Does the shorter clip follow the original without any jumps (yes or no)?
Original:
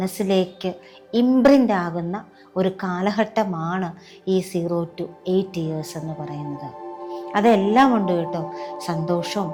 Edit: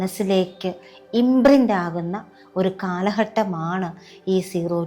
yes